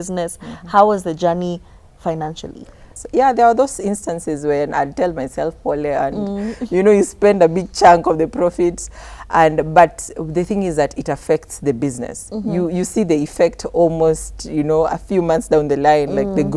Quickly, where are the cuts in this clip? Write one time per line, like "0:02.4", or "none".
0:02.9